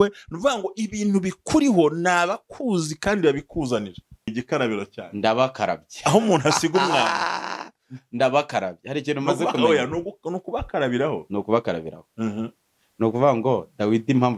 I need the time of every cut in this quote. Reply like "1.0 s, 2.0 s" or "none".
4.4 s